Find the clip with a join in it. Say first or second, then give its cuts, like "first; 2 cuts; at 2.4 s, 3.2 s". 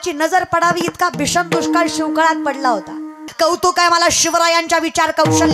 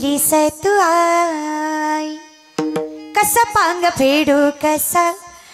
first; 1 cut; at 3.3 s